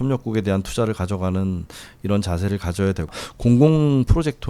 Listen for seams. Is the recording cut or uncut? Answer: cut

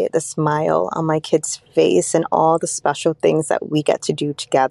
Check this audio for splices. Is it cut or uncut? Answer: uncut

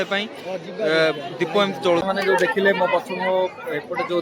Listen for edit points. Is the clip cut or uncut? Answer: cut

